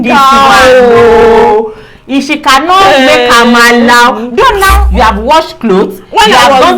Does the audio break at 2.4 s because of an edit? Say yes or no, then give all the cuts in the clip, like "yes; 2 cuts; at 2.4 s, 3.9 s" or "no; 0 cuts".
no; 1 cut; at 4.8 s